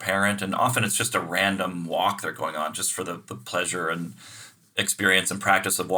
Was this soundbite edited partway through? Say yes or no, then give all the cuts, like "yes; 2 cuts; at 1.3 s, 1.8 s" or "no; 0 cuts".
no; 0 cuts